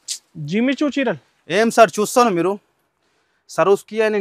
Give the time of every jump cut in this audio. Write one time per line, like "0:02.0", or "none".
none